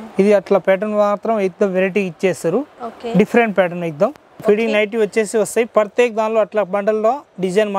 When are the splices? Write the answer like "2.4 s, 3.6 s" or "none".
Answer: 4.4 s